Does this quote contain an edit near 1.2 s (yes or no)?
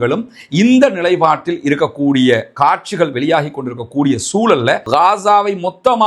no